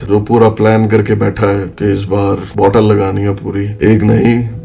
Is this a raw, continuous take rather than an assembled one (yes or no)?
yes